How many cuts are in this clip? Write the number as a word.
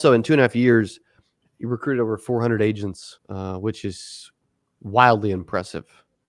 one